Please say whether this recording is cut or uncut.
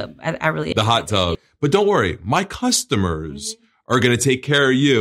cut